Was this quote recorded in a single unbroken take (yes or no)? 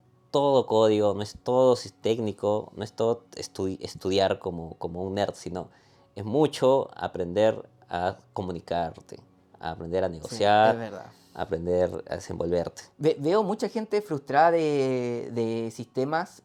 yes